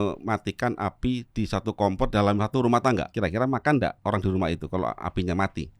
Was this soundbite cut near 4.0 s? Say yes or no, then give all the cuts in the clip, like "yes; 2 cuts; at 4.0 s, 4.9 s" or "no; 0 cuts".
yes; 2 cuts; at 3.1 s, 4.0 s